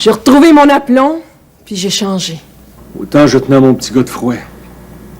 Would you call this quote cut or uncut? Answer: cut